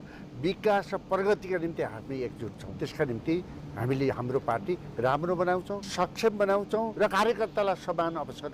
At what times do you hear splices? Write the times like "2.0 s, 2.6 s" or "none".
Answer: 2.6 s, 5.8 s, 7.1 s